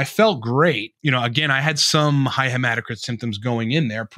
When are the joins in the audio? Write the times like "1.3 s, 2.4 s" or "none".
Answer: 0.9 s